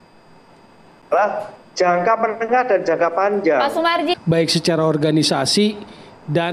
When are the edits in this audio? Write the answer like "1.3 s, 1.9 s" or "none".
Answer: 4.1 s